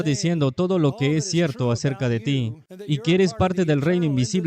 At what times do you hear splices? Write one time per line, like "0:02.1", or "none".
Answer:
0:02.7